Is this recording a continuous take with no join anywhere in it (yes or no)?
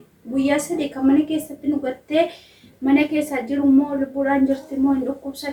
yes